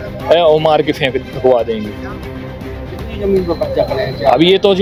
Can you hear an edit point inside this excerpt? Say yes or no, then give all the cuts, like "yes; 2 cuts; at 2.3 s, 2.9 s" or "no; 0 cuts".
no; 0 cuts